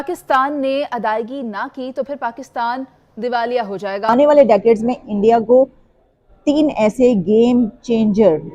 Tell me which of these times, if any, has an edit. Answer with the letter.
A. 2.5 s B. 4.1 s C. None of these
B